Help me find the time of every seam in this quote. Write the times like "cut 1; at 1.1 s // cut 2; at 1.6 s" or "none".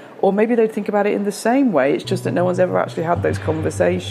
none